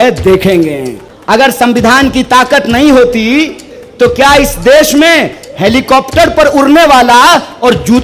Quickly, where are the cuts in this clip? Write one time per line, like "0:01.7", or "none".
0:01.4